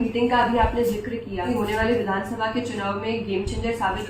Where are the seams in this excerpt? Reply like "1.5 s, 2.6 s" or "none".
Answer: 1.5 s